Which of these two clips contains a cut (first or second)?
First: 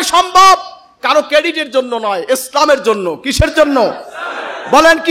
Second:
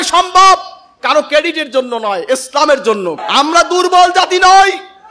second